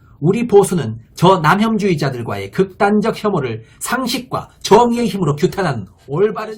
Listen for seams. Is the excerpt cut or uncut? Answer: uncut